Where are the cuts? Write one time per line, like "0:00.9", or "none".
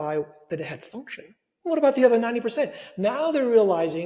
none

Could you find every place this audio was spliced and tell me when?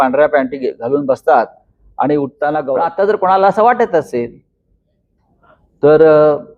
0:02.8

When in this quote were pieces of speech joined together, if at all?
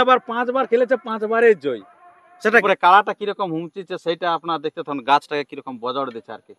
0:02.6

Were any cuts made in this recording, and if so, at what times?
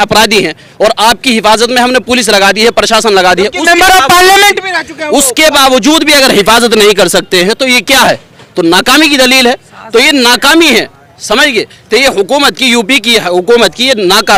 none

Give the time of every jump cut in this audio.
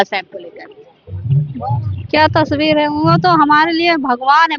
none

